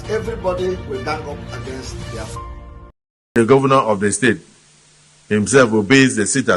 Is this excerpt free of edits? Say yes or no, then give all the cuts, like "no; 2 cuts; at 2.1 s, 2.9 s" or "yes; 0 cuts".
no; 1 cut; at 3.2 s